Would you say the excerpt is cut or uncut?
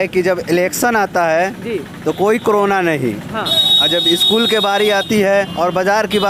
uncut